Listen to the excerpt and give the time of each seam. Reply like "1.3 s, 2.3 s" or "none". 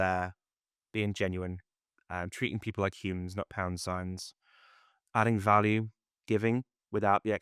5.0 s